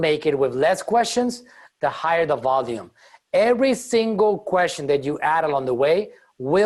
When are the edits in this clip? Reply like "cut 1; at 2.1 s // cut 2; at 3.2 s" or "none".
none